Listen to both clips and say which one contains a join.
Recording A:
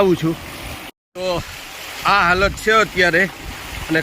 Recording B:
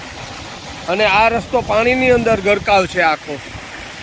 A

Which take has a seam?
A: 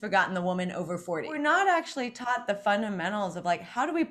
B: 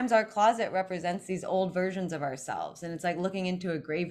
A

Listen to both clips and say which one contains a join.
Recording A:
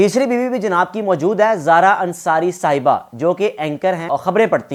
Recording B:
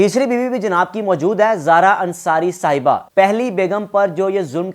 B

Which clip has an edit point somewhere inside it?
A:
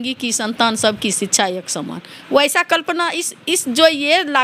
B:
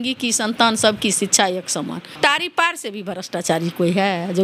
B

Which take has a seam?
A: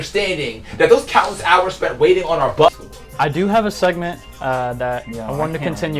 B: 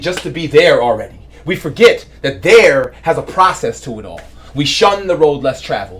A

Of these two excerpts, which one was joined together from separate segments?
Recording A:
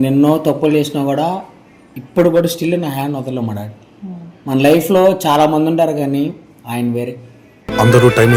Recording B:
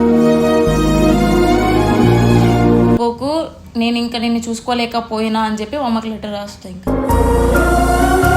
B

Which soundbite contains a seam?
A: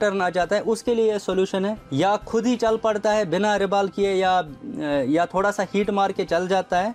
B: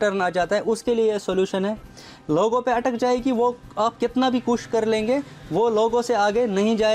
B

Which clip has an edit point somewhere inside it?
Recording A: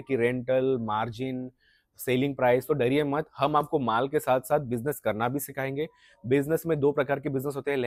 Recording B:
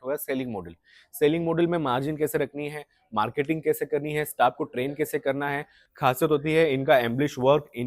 B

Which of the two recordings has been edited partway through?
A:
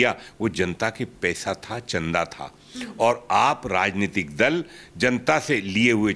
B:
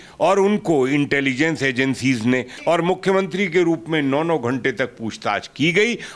B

